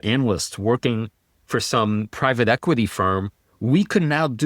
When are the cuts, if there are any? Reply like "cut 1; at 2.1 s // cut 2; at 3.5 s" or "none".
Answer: cut 1; at 2.1 s